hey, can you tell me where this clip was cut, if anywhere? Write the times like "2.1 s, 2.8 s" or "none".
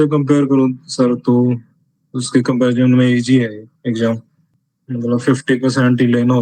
none

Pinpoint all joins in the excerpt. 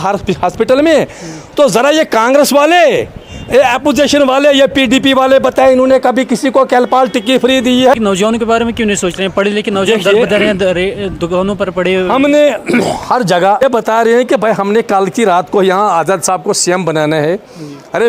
7.9 s, 13.6 s

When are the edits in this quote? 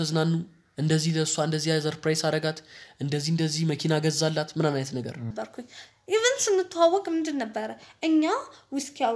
5.3 s

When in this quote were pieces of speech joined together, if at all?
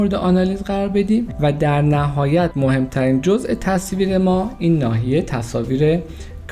1.3 s, 2.5 s

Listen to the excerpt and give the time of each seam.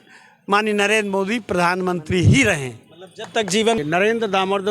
3.8 s

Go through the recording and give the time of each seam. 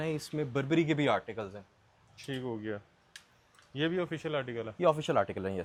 none

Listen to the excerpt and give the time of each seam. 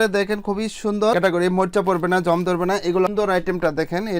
1.1 s, 3.1 s

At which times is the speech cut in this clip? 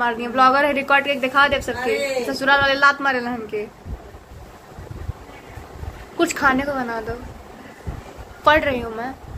none

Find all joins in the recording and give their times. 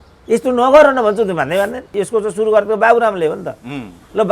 1.8 s

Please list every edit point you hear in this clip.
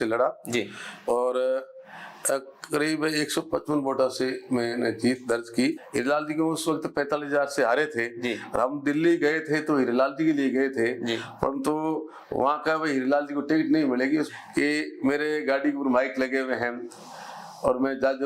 5.8 s, 14.3 s

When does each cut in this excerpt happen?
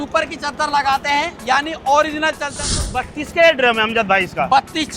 2.8 s

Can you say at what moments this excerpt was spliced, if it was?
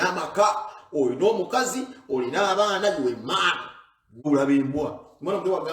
4.0 s

